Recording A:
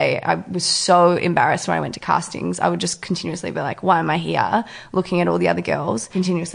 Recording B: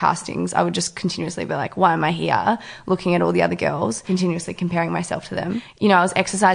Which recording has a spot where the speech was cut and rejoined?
B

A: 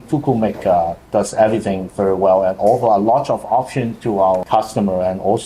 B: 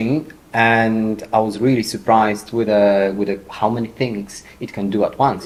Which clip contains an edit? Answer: A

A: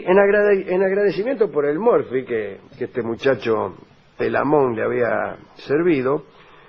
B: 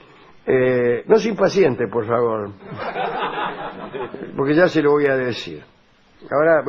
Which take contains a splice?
A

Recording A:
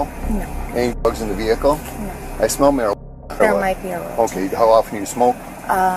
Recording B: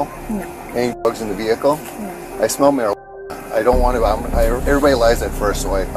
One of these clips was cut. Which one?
A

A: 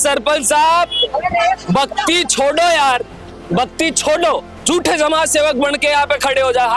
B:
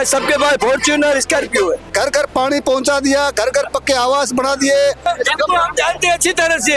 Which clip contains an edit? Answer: B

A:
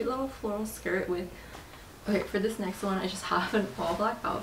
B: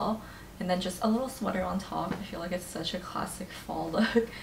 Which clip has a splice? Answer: A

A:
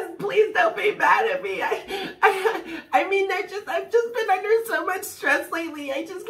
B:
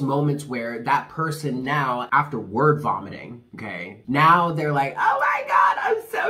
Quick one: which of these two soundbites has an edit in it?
B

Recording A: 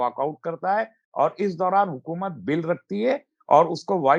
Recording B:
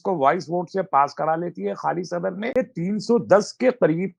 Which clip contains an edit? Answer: B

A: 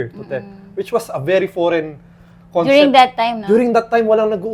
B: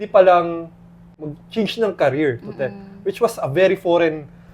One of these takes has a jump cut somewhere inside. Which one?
B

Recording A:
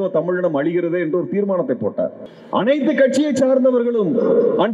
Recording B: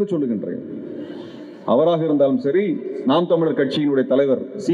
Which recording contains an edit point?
A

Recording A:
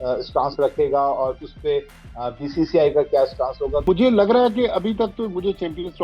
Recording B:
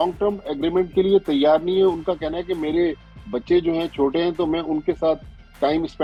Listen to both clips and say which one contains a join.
A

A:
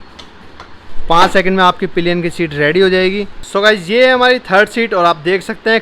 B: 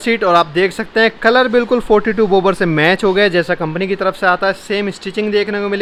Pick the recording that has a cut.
A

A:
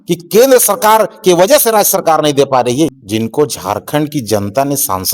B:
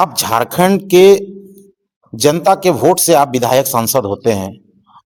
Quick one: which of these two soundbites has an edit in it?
A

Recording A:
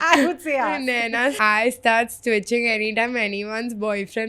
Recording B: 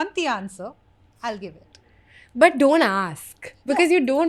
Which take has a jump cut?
A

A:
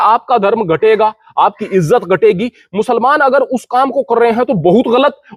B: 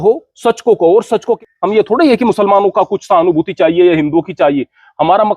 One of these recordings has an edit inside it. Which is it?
B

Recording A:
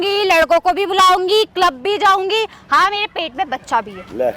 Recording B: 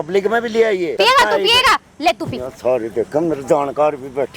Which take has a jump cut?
B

